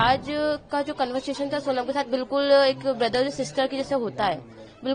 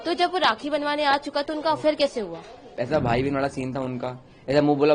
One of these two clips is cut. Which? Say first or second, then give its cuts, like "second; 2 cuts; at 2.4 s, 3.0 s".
second; 1 cut; at 2.7 s